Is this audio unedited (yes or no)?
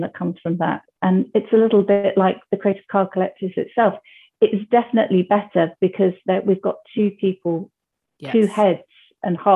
yes